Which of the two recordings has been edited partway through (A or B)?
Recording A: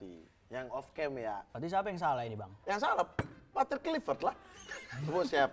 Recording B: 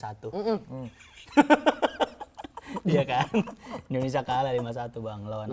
A